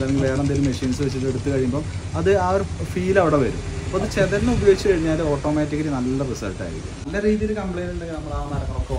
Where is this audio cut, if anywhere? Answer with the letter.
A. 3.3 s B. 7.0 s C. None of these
B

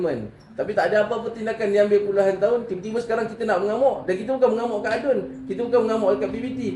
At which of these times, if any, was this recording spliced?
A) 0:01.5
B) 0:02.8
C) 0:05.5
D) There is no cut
D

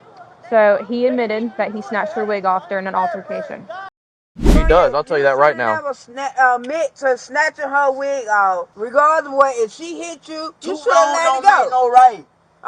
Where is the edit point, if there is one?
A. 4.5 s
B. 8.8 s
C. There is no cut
A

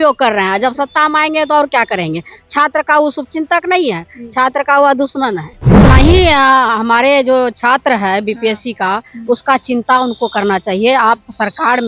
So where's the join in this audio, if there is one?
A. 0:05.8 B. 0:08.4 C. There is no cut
A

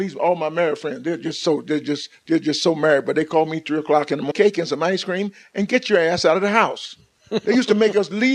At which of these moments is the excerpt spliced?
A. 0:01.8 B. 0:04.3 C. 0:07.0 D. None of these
D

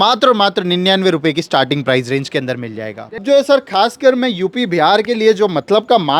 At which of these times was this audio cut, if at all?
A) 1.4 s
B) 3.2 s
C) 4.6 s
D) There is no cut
B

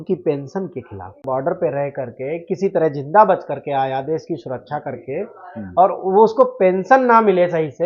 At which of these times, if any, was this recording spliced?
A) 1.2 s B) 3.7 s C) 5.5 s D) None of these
A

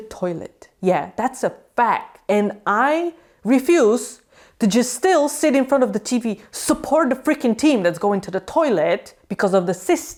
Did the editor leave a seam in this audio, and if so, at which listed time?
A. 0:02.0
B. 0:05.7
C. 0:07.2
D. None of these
D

